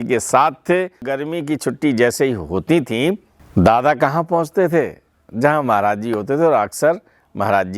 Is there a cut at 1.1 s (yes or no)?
yes